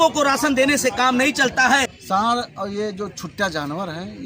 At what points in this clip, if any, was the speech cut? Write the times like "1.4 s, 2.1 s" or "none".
2.0 s